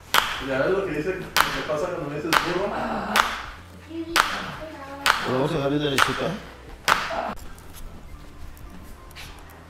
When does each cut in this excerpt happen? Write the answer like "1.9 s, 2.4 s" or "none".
7.3 s